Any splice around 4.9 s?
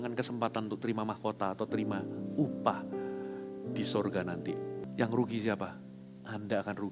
yes; 1 cut; at 4.9 s

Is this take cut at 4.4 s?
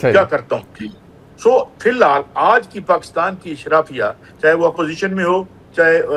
no; 0 cuts

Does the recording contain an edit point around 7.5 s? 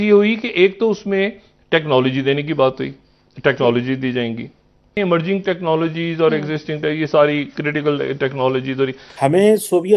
no; 2 cuts; at 5.0 s, 9.0 s

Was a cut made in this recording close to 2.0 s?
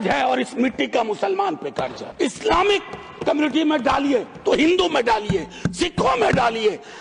yes; 1 cut; at 2.0 s

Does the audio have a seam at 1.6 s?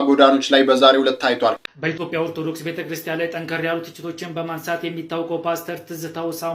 yes; 1 cut; at 1.6 s

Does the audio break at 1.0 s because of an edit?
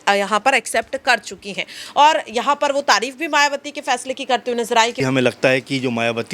no; 1 cut; at 5.0 s

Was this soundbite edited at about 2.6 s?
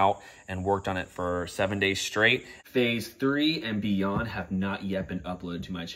yes; 1 cut; at 2.6 s

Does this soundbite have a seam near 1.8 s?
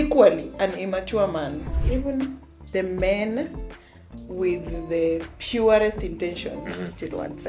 yes; 1 cut; at 1.8 s

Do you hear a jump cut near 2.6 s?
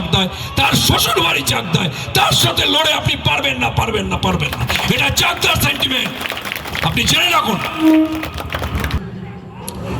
no; 1 cut; at 8.9 s

